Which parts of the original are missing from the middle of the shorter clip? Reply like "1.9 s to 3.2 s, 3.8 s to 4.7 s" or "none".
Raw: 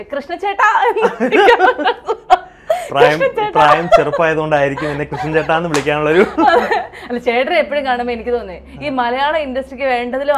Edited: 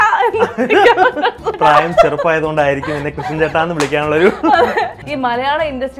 2.2 s to 3.5 s, 6.9 s to 8.7 s